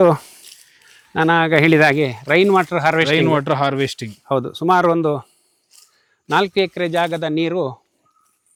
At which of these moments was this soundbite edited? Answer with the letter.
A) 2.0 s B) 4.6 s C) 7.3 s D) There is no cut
D